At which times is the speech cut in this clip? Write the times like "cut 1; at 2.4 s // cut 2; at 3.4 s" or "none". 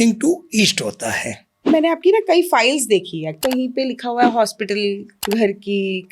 cut 1; at 1.7 s // cut 2; at 3.4 s // cut 3; at 5.1 s